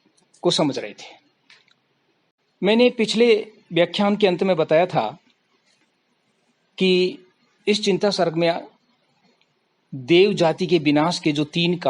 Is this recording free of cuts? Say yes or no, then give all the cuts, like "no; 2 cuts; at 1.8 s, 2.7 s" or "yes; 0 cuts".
no; 1 cut; at 10.3 s